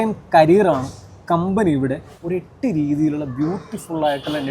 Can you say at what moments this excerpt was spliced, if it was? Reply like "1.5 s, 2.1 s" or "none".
2.1 s